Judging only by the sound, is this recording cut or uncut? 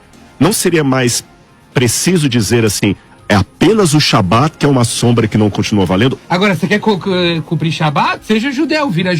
cut